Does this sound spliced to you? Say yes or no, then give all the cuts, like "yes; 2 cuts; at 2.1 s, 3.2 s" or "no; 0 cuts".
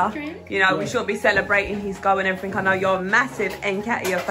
no; 0 cuts